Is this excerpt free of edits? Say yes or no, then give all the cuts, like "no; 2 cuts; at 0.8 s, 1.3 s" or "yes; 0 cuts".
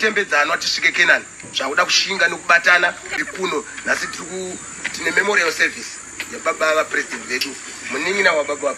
no; 1 cut; at 3.1 s